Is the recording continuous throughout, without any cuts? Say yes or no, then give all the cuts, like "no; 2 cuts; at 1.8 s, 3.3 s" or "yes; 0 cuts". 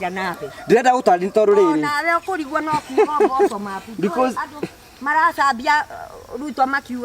yes; 0 cuts